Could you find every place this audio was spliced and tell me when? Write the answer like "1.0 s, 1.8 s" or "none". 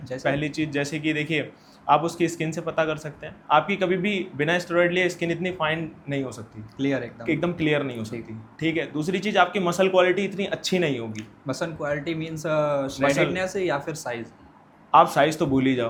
none